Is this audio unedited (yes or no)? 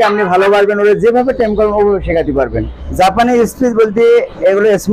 no